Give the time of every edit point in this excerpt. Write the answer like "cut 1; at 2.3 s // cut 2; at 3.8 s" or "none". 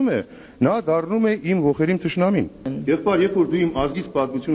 cut 1; at 2.6 s